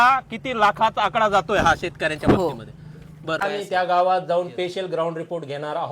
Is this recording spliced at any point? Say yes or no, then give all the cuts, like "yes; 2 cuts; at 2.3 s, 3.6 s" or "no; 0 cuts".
yes; 1 cut; at 3.4 s